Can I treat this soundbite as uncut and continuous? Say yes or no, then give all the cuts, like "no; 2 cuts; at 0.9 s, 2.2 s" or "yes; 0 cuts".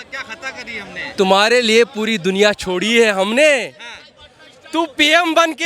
yes; 0 cuts